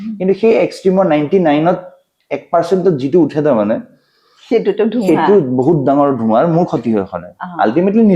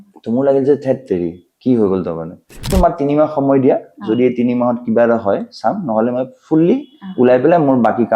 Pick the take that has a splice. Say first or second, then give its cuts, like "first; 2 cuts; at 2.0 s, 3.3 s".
second; 1 cut; at 2.7 s